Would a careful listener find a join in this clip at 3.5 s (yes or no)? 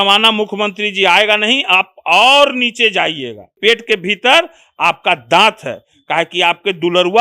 yes